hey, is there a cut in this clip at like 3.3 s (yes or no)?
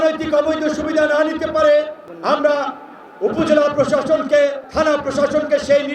no